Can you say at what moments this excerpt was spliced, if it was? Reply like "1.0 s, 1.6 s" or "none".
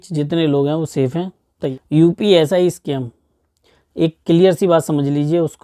1.7 s